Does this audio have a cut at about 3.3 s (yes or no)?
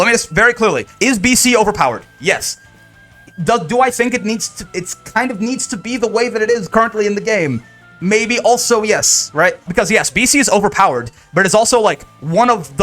no